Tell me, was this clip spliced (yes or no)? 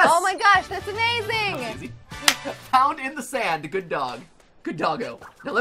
no